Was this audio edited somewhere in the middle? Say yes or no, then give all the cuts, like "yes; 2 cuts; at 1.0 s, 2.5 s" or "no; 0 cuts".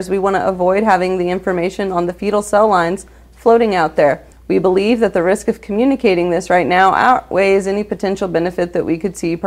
yes; 1 cut; at 4.3 s